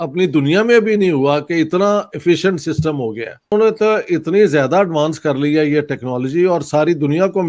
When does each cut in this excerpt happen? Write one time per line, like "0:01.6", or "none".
0:03.5

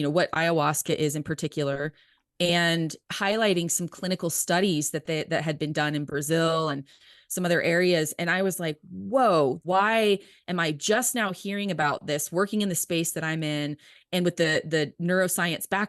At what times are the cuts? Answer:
0:09.6

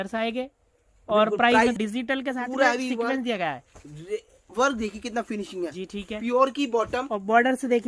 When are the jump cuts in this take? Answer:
0:01.8

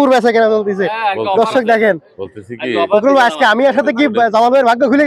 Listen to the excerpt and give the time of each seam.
none

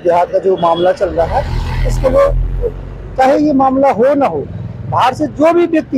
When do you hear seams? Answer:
none

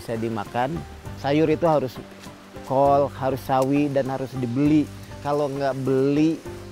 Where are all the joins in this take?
0:01.1
0:05.2

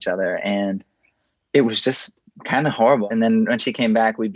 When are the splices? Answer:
0:03.0

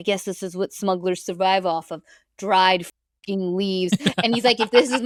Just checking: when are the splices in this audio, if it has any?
none

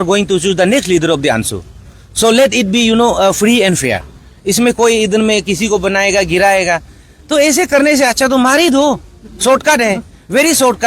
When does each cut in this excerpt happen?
none

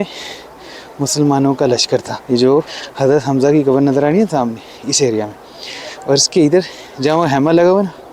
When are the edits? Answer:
0:02.1
0:02.8

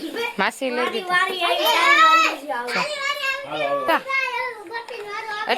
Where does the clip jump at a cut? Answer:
0:03.9

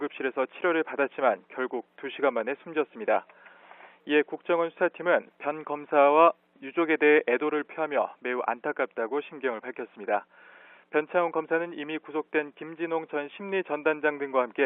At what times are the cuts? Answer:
0:09.6

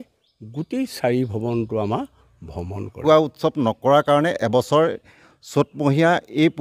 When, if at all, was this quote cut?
0:03.0

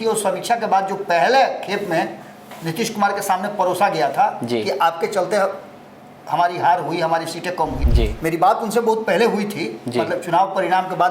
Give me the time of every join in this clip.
0:07.8

